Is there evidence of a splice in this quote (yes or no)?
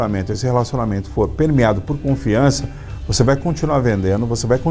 no